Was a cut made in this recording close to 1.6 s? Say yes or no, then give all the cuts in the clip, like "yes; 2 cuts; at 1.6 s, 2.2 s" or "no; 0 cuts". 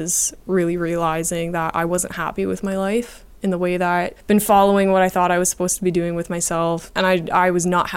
no; 2 cuts; at 4.2 s, 6.9 s